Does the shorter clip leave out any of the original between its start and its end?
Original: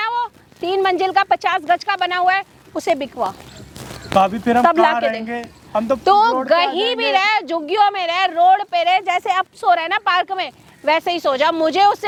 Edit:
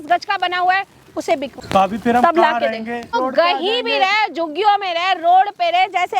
yes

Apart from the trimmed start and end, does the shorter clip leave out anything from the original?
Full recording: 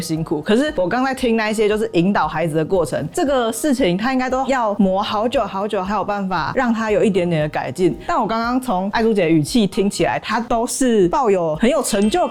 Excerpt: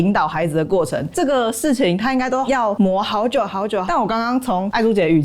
yes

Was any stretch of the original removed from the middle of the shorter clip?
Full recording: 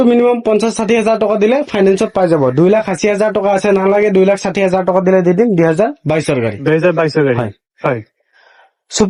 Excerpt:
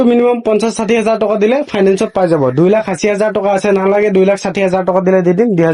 no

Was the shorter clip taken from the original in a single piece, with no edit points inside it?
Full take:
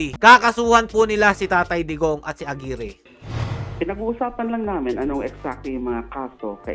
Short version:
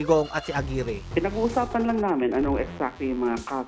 no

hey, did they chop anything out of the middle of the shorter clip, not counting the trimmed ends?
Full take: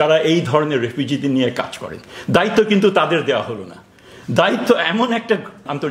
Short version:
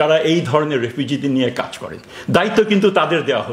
no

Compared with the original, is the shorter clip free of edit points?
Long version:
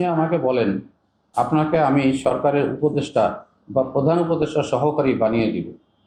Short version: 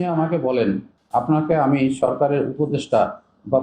no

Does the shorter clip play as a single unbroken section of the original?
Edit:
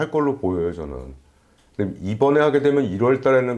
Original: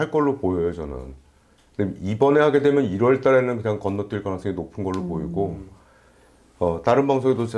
yes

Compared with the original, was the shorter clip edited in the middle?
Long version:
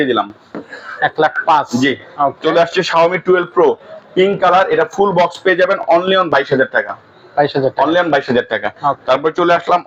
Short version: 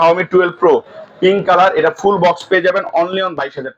no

